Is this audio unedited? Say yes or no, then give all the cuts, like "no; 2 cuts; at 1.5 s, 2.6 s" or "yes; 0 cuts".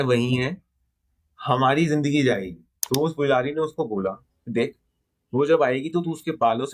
no; 1 cut; at 2.7 s